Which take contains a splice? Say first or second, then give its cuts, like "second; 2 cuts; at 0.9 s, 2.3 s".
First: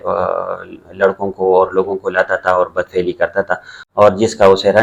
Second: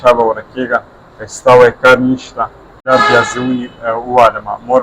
second; 1 cut; at 2.9 s